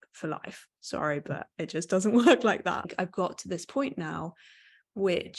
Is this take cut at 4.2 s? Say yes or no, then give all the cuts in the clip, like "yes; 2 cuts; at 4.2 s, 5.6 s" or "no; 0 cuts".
no; 1 cut; at 2.9 s